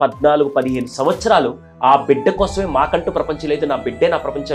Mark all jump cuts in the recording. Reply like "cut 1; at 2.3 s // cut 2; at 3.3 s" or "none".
none

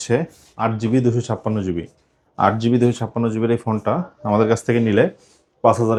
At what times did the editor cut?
none

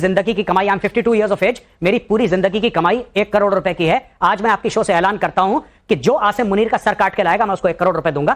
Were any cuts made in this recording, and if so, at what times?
none

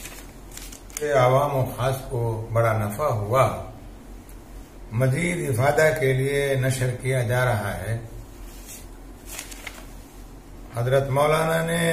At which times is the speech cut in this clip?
cut 1; at 1.0 s

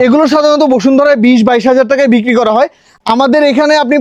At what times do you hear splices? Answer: none

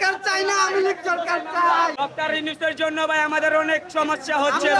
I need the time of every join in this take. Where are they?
cut 1; at 1.9 s

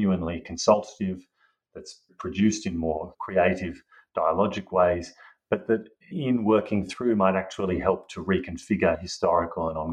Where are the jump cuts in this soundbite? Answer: cut 1; at 2.1 s // cut 2; at 3.1 s // cut 3; at 6.1 s

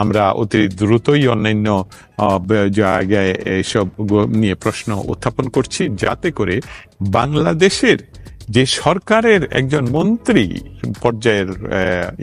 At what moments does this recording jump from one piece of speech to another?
none

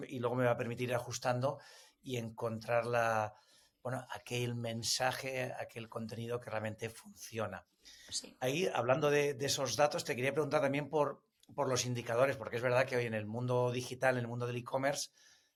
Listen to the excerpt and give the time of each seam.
none

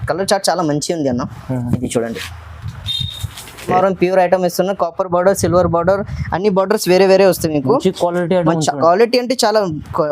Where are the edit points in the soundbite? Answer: cut 1; at 3.7 s

